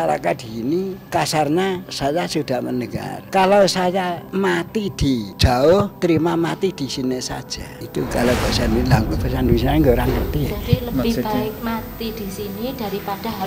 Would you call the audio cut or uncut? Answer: cut